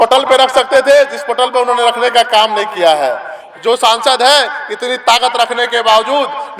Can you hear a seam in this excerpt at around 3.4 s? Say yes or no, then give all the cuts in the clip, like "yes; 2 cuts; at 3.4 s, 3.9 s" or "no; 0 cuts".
yes; 1 cut; at 3.4 s